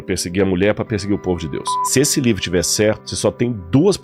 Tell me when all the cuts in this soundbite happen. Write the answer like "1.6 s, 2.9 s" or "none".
1.8 s, 3.1 s